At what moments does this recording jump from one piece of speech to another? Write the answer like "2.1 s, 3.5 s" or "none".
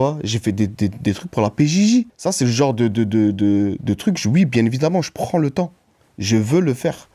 2.1 s